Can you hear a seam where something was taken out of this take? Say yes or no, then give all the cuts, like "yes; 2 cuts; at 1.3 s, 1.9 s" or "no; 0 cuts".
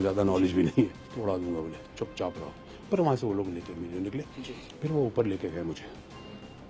yes; 2 cuts; at 1.1 s, 4.4 s